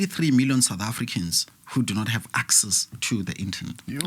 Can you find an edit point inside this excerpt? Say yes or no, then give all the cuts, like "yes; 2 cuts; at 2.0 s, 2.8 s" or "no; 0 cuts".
no; 0 cuts